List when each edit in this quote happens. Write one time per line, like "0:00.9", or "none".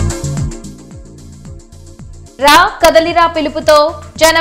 0:01.4